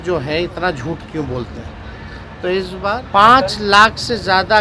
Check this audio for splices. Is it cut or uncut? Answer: cut